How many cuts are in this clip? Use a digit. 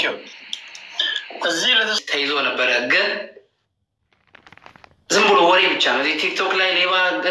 1